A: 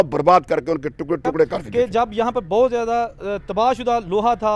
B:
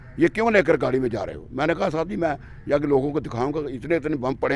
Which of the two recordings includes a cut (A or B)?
A